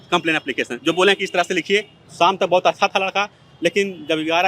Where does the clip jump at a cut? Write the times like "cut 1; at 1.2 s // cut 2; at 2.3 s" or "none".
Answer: cut 1; at 2.0 s